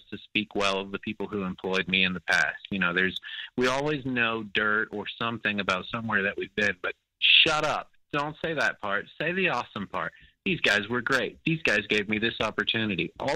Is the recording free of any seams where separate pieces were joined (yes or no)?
yes